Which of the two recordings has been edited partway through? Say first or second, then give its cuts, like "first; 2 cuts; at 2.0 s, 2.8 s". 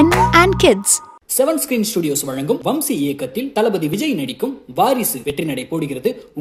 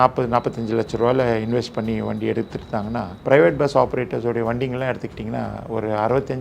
second; 1 cut; at 3.1 s